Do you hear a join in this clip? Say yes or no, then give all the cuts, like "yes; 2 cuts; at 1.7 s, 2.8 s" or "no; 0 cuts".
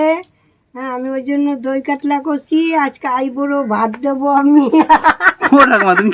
no; 0 cuts